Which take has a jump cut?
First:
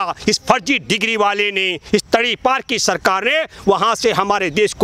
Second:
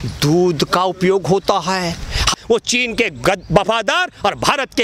second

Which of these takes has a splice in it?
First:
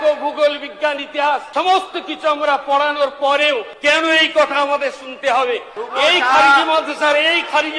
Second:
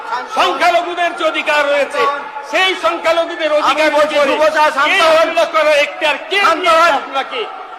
first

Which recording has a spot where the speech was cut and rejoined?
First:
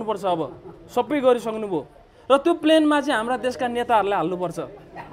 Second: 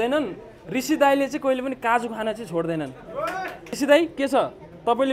second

